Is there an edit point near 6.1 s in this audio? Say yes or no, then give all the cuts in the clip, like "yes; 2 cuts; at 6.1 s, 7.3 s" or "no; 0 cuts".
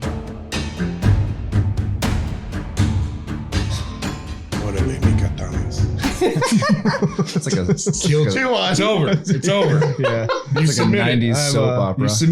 yes; 1 cut; at 6.1 s